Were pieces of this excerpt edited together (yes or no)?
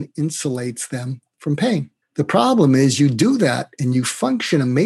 no